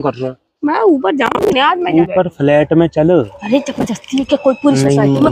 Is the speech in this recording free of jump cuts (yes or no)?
no